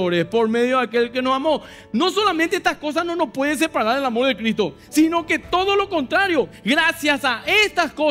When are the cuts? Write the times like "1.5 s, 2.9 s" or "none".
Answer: none